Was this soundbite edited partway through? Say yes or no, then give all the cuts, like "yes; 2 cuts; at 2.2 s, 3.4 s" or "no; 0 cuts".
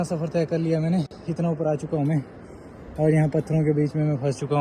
no; 0 cuts